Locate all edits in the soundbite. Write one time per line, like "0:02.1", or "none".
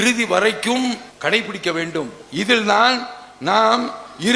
0:01.1